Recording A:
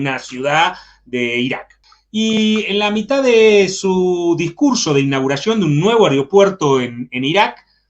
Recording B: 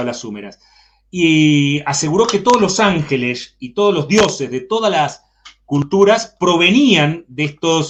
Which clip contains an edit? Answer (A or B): A